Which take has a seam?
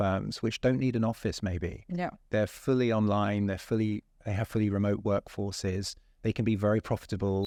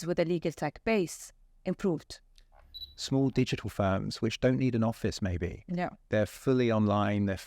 second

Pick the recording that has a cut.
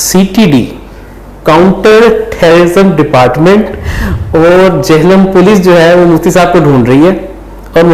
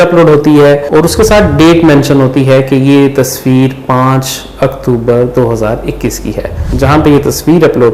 second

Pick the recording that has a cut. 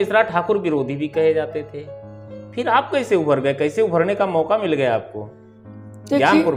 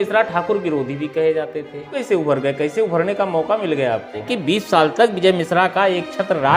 second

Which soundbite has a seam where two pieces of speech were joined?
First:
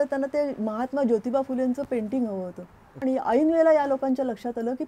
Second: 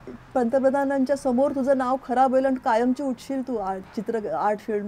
first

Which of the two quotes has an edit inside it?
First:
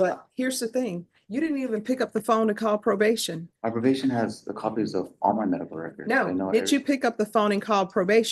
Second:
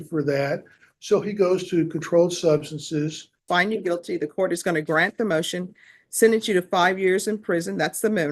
second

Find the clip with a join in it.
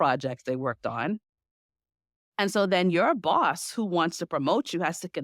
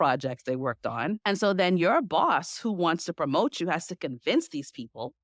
second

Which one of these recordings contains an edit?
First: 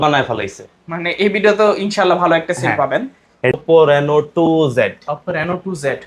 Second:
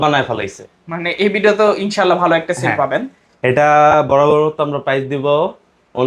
first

